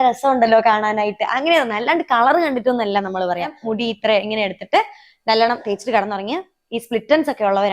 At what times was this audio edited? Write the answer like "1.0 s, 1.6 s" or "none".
3.5 s